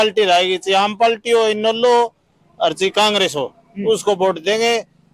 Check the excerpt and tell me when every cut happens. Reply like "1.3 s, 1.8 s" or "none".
none